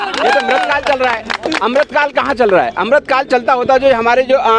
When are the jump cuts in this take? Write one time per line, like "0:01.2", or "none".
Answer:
none